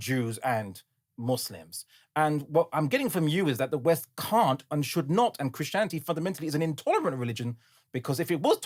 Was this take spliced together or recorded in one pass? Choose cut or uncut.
uncut